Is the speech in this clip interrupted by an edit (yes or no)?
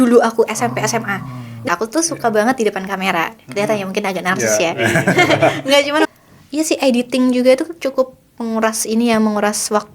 yes